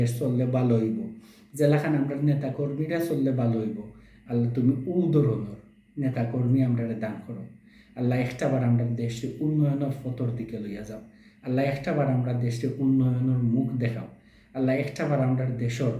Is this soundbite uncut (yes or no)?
yes